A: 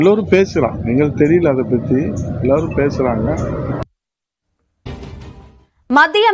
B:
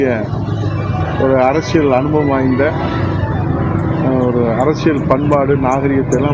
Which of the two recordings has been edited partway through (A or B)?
A